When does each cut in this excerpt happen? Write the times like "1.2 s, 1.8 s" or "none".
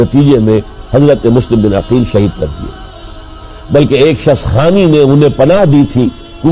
none